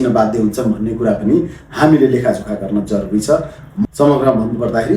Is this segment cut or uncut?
cut